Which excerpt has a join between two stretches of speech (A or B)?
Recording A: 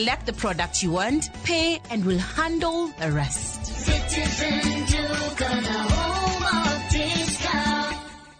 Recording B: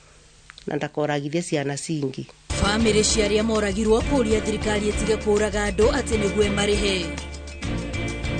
B